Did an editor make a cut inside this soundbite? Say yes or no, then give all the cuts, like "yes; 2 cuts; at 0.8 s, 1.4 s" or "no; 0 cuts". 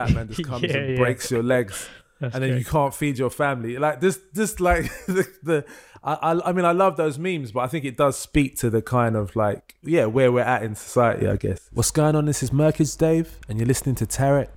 yes; 2 cuts; at 9.7 s, 11.6 s